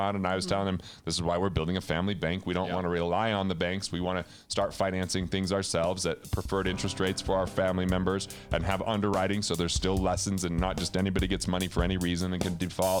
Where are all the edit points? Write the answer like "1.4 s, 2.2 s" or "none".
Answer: none

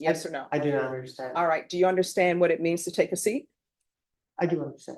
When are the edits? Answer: none

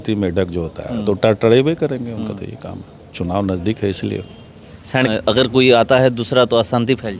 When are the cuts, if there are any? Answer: 5.1 s

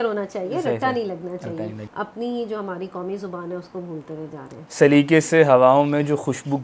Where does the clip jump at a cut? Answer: 1.8 s, 4.6 s

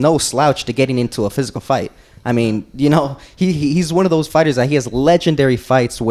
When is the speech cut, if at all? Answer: none

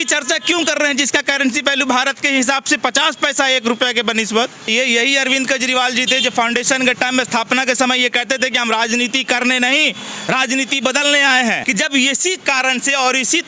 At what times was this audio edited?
4.7 s, 11.6 s

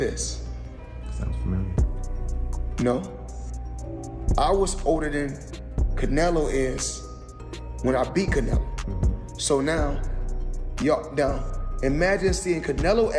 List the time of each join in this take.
none

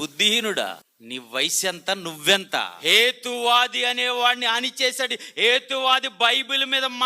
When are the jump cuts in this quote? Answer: 0.9 s, 2.7 s

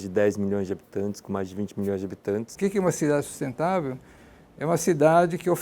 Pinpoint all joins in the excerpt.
2.5 s

